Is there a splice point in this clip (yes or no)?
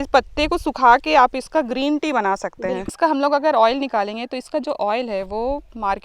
yes